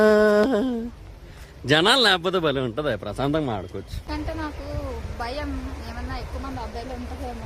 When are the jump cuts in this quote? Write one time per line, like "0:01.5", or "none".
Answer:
0:04.1